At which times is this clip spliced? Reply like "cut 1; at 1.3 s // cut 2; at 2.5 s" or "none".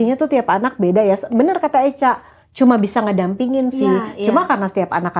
none